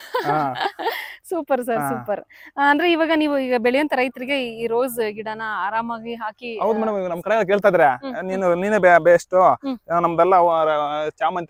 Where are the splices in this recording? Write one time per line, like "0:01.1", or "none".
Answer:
none

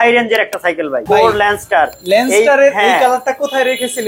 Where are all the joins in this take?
0:01.0

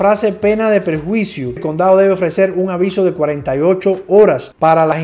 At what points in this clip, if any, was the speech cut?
0:01.6

